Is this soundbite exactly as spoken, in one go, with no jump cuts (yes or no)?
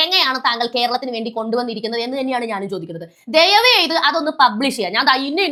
yes